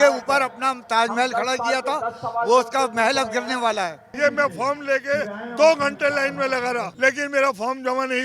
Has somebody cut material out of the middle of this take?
yes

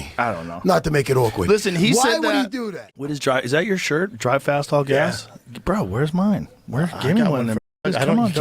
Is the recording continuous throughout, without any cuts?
no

